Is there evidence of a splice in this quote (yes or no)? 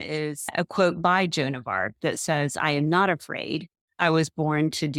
no